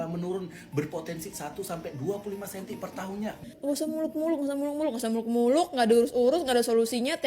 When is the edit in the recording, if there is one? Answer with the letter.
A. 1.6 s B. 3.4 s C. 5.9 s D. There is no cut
B